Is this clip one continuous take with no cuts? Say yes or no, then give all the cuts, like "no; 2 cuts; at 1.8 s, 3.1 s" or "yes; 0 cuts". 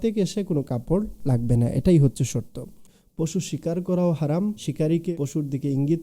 no; 2 cuts; at 3.0 s, 4.6 s